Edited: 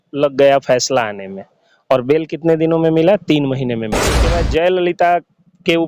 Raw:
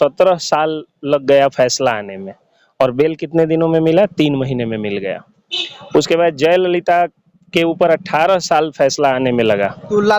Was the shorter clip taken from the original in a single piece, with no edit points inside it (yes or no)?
no